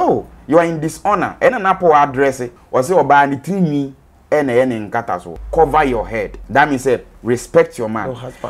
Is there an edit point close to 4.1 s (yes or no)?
no